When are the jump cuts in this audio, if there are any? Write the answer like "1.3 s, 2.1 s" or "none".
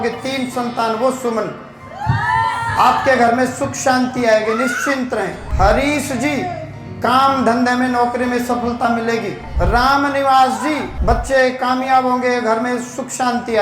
5.4 s, 9.4 s, 10.9 s